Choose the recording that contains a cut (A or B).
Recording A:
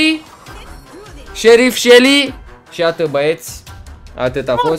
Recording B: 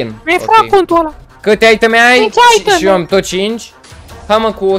B